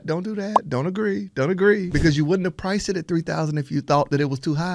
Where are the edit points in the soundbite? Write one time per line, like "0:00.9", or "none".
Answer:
0:01.9